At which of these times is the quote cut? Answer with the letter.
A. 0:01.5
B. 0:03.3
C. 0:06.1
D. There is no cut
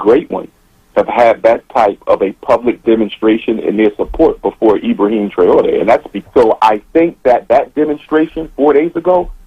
C